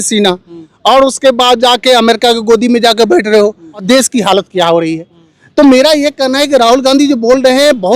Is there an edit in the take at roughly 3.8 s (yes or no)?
yes